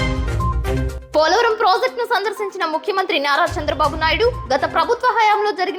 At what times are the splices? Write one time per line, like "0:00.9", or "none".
0:00.9